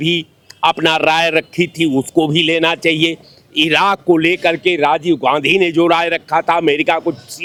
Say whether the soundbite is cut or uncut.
uncut